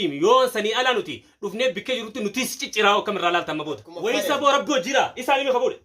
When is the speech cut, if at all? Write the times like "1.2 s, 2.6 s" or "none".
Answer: 3.9 s

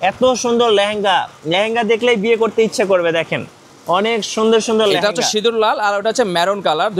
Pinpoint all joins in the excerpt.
none

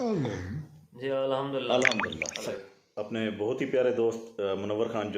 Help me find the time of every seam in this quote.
2.7 s

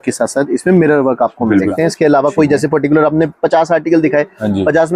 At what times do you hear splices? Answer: 1.7 s

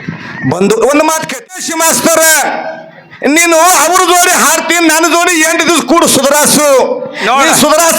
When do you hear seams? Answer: 1.5 s

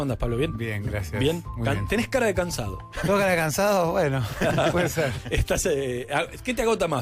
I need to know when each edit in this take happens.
none

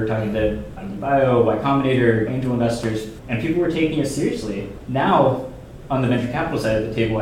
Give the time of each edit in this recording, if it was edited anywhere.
3.2 s, 4.8 s

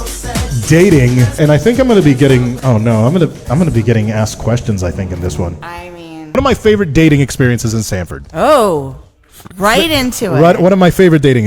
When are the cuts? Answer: 1.4 s, 2.6 s, 6.3 s

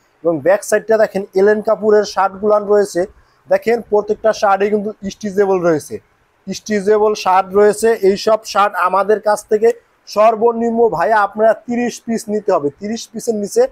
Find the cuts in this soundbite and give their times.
none

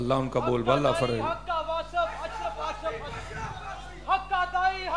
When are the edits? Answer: none

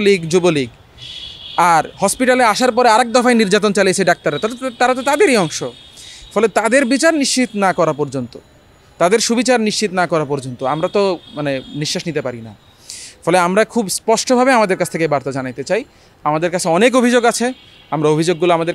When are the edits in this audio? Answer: none

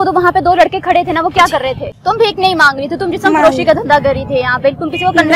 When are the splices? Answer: 1.9 s

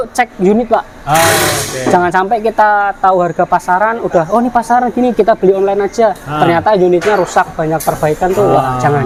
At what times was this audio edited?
none

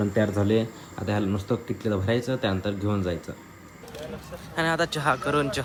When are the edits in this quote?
none

